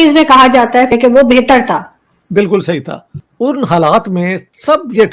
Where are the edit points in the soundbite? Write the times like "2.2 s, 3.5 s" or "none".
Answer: 0.9 s